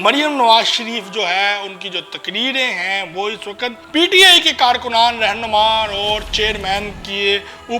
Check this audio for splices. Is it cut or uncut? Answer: cut